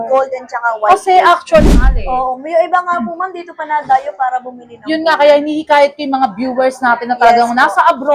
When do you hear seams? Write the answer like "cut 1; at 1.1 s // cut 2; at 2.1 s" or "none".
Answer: cut 1; at 1.7 s